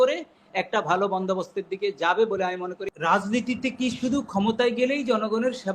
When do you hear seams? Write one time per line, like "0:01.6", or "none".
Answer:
0:02.8